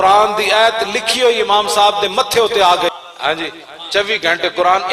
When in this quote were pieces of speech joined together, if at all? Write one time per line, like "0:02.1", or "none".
0:02.9